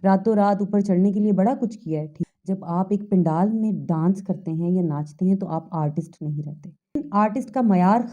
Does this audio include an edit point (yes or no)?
yes